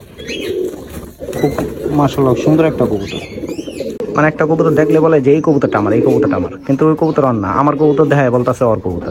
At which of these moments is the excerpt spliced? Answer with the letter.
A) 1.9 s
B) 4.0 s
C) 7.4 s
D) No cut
B